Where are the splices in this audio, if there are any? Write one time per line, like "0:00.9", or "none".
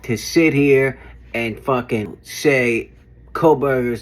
0:02.2